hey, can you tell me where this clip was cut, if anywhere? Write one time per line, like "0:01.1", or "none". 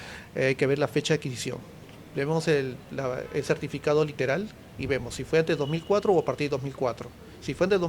none

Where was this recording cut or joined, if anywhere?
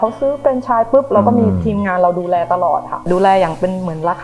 0:03.0

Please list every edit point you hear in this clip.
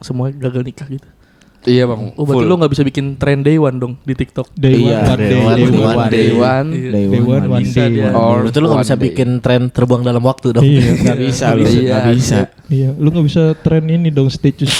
none

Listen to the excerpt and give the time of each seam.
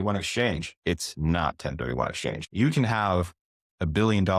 0:02.4

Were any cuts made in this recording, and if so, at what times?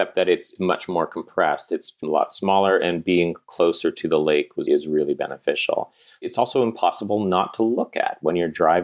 0:06.3

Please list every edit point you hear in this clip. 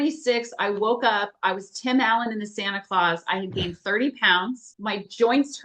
0:04.7

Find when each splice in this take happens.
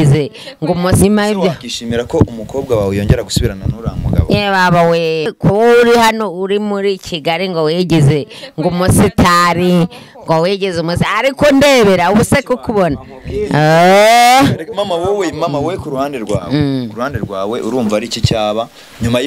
0:01.0
0:05.3

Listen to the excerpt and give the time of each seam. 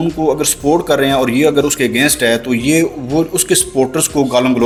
none

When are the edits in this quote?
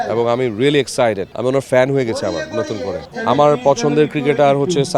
0:01.3
0:03.0

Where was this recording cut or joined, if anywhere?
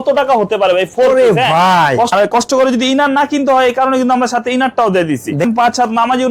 0:02.1
0:05.5

